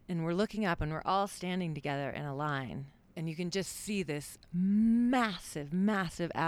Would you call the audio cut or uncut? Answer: cut